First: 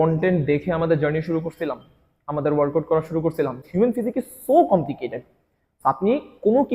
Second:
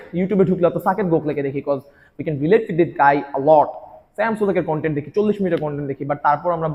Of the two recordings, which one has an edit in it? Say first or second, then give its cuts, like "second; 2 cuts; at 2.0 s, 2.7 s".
first; 1 cut; at 3.6 s